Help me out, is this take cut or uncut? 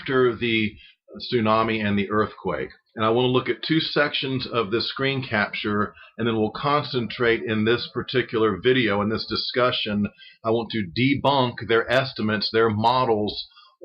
cut